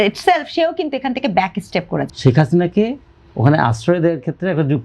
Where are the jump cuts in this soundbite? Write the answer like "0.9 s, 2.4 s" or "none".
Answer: 2.1 s